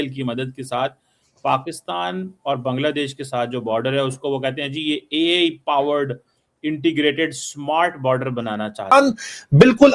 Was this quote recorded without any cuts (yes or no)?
no